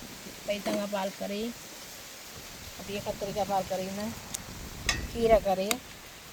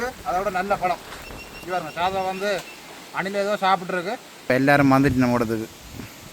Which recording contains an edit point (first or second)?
second